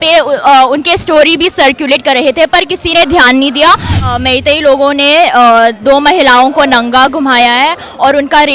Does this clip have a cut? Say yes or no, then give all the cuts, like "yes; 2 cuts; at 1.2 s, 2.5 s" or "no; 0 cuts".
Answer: yes; 1 cut; at 4.0 s